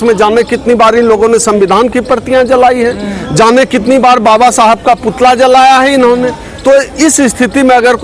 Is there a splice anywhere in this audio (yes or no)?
no